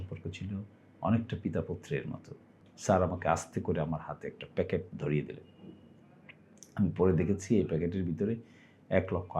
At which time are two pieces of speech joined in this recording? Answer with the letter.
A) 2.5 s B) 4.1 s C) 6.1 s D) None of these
A